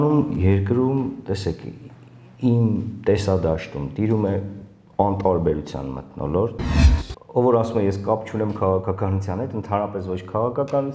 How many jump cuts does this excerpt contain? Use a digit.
1